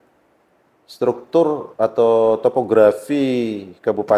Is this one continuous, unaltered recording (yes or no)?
yes